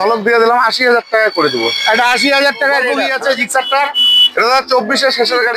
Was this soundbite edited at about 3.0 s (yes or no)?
yes